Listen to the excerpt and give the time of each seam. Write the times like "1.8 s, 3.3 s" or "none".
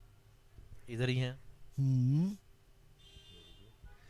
none

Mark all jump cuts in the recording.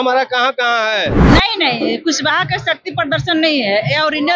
1.2 s

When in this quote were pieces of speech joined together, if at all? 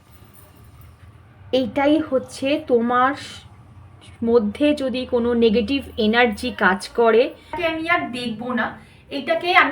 7.5 s

